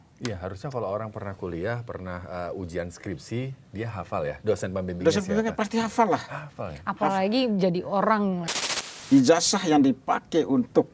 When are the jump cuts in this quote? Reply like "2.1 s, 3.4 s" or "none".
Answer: 4.4 s, 8.4 s